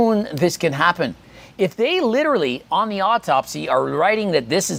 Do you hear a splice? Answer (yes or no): no